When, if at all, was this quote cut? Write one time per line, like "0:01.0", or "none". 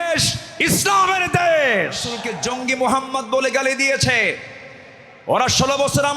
0:02.3